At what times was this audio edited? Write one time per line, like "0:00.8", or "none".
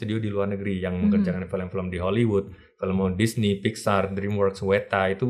none